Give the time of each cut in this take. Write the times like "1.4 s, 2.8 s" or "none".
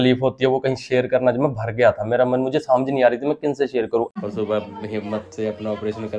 4.1 s